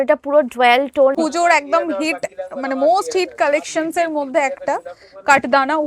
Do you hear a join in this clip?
yes; 1 cut; at 1.2 s

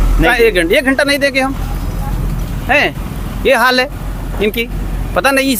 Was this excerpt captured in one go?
yes; 0 cuts

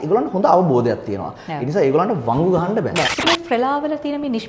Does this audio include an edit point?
yes; 1 cut; at 3.1 s

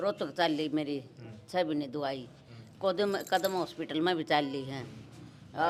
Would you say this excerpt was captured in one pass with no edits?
yes; 0 cuts

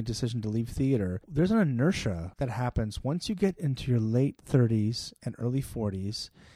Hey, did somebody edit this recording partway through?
yes; 2 cuts; at 1.2 s, 2.3 s

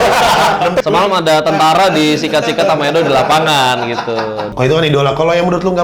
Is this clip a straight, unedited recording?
no; 2 cuts; at 0.8 s, 4.5 s

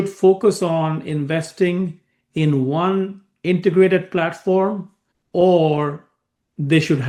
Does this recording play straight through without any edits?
yes; 0 cuts

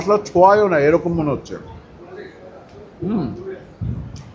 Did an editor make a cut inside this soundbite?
no; 0 cuts

